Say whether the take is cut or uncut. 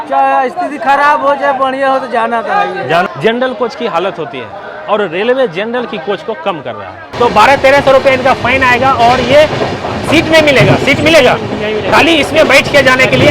cut